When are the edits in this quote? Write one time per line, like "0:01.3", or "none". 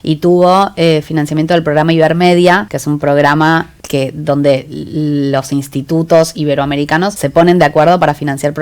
0:02.7
0:03.8
0:07.2